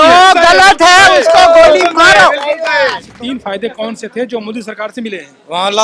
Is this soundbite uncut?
no; 1 cut; at 3.1 s

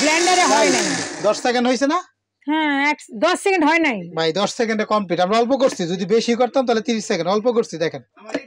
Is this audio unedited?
yes; 0 cuts

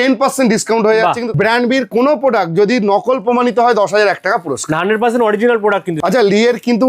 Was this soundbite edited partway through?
yes; 2 cuts; at 1.3 s, 5.9 s

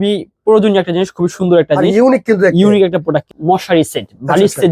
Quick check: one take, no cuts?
no; 1 cut; at 3.3 s

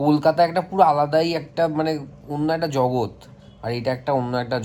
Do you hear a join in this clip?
no; 0 cuts

